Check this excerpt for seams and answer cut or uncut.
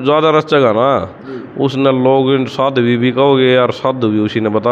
uncut